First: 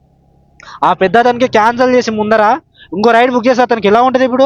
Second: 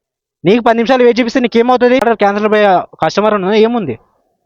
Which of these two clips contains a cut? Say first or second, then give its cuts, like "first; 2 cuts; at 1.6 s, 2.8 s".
second; 1 cut; at 2.0 s